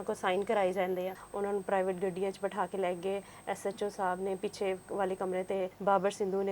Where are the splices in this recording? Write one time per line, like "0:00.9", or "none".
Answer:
0:01.2
0:05.7